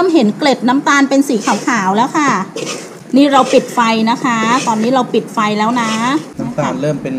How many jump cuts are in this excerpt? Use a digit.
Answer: 0